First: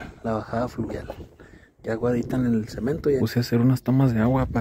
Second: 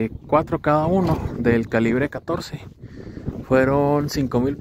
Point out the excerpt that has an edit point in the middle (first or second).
first